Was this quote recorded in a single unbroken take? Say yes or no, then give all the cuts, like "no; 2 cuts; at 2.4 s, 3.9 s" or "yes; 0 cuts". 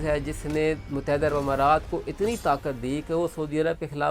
yes; 0 cuts